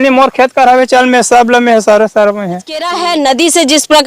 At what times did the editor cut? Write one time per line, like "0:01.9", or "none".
0:02.9